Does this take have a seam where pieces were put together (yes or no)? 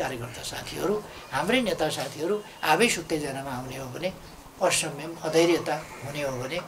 no